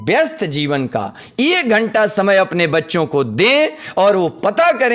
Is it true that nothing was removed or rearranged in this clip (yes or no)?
yes